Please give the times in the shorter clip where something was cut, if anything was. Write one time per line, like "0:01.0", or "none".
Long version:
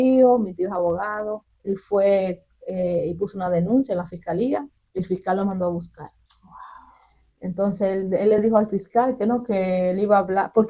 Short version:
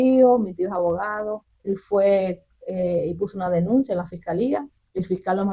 none